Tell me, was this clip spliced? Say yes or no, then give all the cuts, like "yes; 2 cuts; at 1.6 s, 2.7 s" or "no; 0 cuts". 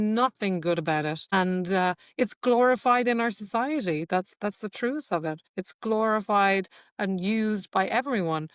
yes; 2 cuts; at 1.3 s, 5.5 s